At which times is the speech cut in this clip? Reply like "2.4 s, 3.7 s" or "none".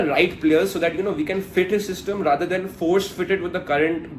none